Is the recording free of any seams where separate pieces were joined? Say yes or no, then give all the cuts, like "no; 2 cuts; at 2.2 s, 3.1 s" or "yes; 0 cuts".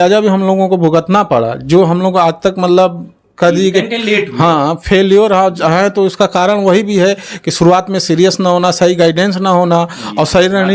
yes; 0 cuts